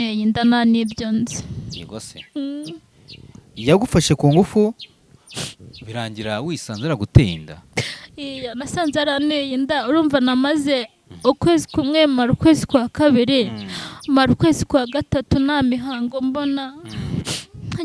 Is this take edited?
no; 0 cuts

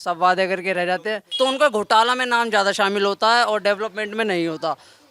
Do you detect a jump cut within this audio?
yes; 1 cut; at 1.2 s

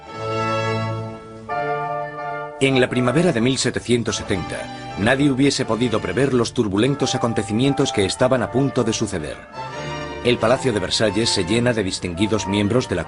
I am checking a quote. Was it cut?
no; 0 cuts

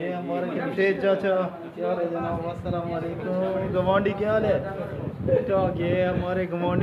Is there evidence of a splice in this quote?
no; 0 cuts

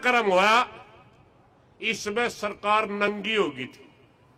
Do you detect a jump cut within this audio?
no; 0 cuts

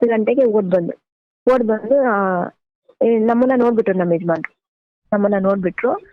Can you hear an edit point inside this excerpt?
no; 0 cuts

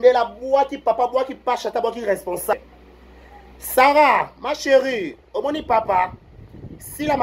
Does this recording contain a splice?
yes; 1 cut; at 2.5 s

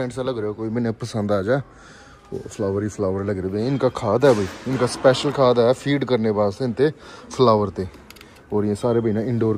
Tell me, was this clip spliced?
no; 0 cuts

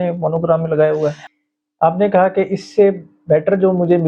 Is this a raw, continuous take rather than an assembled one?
no; 1 cut; at 1.2 s

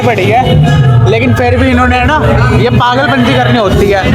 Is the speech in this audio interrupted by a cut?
no; 0 cuts

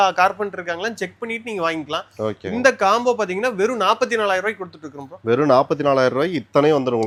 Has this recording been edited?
no; 0 cuts

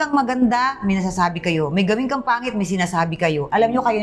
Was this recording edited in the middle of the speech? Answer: no; 0 cuts

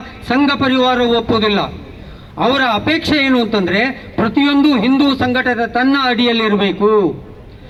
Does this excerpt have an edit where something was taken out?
no; 0 cuts

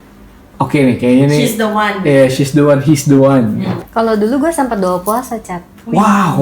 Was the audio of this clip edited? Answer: yes; 1 cut; at 3.7 s

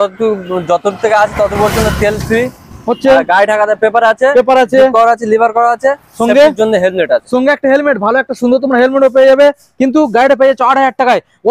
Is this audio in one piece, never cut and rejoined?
yes; 0 cuts

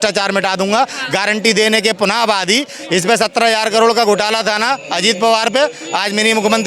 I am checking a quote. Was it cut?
no; 0 cuts

